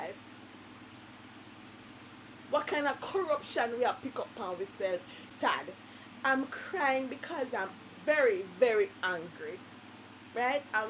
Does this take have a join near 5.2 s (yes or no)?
yes